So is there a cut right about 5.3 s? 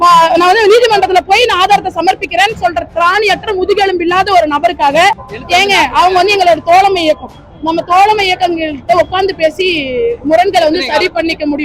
yes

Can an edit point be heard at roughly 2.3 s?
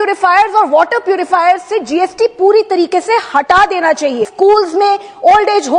no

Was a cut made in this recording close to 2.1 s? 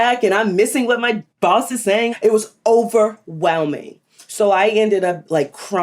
yes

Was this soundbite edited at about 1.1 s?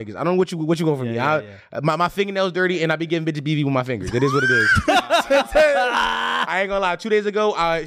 no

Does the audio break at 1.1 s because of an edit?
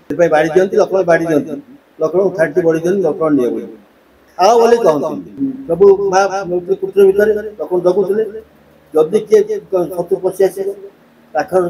no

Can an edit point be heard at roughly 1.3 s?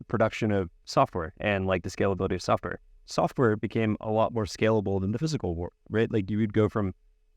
no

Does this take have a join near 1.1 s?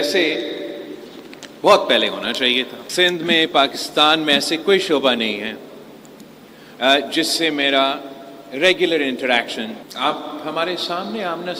no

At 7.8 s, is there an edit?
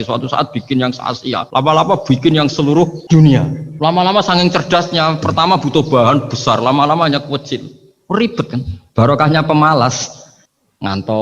no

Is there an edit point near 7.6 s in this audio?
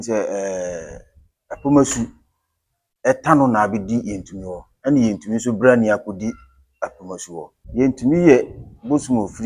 yes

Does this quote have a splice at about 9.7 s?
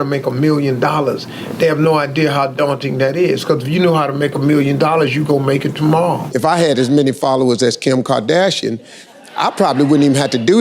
no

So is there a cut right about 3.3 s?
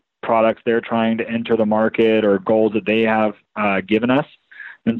no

